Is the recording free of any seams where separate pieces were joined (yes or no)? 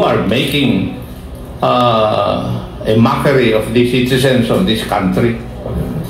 yes